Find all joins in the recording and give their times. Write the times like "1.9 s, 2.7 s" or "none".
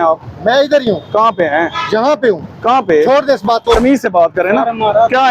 3.8 s